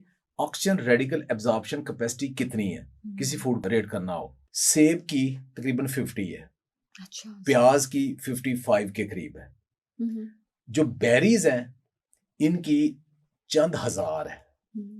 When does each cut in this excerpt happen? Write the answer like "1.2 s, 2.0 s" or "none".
3.6 s